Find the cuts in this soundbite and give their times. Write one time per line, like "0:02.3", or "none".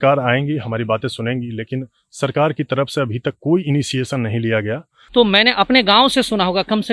0:04.9